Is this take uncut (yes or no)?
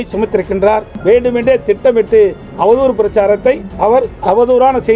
no